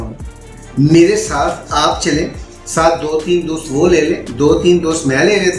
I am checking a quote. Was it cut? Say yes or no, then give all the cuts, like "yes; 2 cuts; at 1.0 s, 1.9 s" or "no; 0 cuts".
no; 0 cuts